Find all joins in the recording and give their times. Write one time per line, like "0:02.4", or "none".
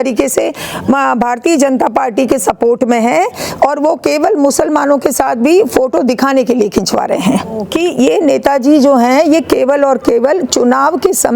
0:07.7